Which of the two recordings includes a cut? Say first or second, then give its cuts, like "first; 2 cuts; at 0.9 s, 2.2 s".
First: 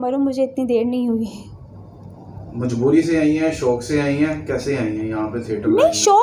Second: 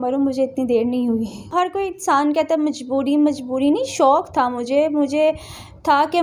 second; 1 cut; at 1.5 s